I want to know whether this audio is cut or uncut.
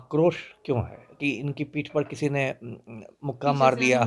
cut